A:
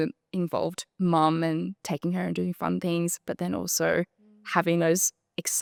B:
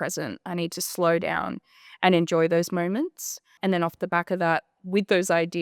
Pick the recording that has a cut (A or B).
B